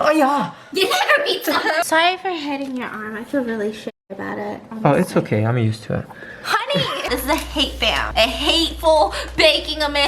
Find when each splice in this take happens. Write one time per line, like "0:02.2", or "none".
0:01.8
0:07.1